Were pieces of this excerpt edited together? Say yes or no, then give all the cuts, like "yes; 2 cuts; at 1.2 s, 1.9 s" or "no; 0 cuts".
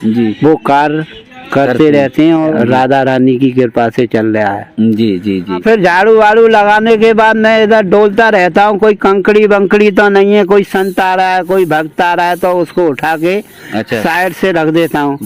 yes; 2 cuts; at 2.5 s, 5.6 s